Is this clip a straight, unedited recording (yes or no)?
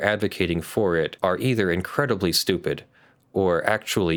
yes